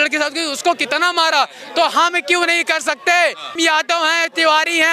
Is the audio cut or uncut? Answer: cut